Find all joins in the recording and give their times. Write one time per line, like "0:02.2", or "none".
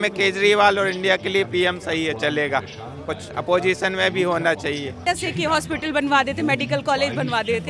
0:04.9

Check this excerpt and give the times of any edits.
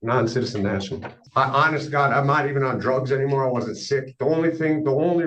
0:01.2

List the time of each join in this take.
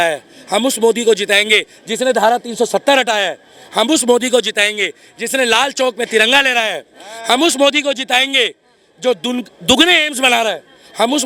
none

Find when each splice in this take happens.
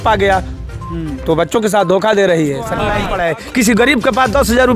0:02.9

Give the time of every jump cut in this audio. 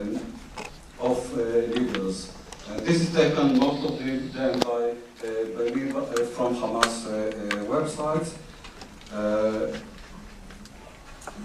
none

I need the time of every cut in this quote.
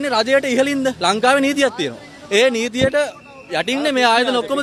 none

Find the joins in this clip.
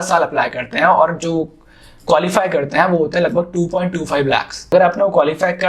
0:04.7

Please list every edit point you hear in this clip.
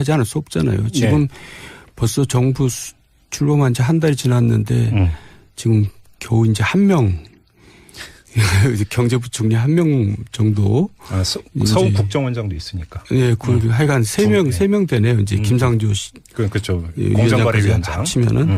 0:14.4

